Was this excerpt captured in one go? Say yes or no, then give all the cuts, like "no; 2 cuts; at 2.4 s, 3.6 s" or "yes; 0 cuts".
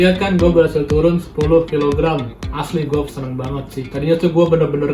no; 1 cut; at 3.8 s